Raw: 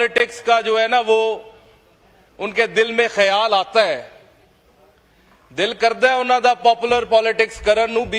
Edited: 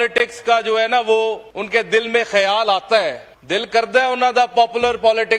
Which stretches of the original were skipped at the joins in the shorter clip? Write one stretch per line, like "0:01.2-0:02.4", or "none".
0:01.5-0:02.4
0:04.1-0:05.4